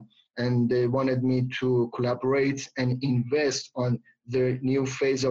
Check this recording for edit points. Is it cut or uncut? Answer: uncut